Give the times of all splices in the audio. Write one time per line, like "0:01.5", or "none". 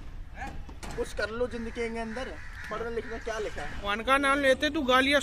0:03.9

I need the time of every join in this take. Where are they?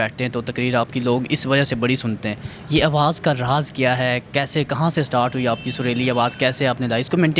none

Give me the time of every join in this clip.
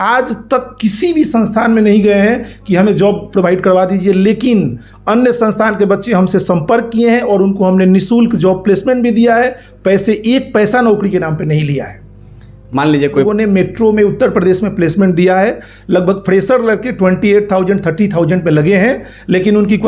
0:13.2

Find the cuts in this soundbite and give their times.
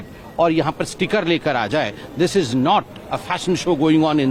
none

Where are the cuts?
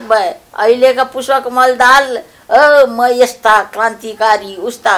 none

